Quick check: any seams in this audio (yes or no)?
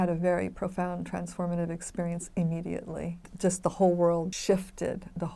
yes